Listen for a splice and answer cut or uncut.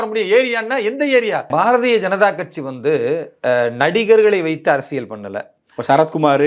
cut